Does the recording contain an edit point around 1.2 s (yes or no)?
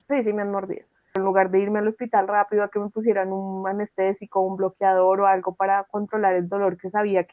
yes